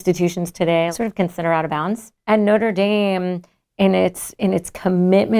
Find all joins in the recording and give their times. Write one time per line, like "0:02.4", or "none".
0:00.9
0:02.1